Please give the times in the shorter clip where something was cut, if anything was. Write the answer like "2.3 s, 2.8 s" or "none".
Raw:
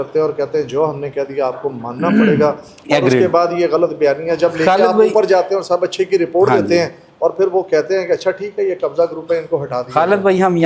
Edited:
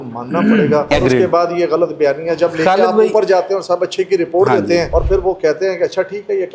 0.9 s, 4.9 s